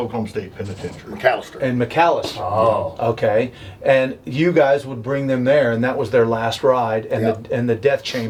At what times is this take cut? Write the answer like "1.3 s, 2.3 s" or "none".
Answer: none